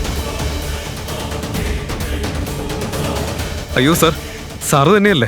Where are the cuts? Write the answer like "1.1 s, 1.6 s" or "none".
3.6 s